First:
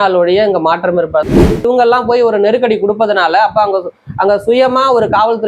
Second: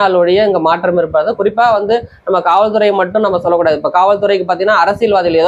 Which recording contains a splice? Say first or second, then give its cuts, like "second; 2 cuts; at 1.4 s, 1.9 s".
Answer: first; 1 cut; at 1.4 s